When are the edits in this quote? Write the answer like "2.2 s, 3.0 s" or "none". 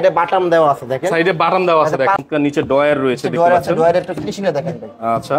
2.2 s